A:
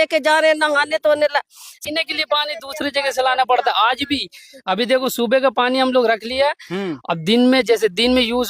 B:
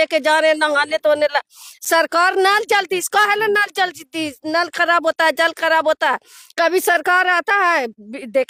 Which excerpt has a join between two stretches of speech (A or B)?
A